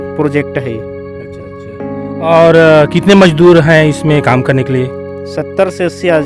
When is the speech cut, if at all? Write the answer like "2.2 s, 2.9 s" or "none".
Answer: none